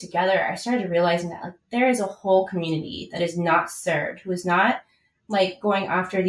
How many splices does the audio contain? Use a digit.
0